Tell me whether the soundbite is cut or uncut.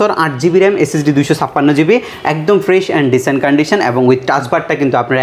uncut